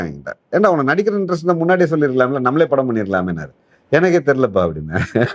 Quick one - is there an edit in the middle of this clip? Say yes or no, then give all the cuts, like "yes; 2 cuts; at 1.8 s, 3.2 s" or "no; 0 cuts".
no; 0 cuts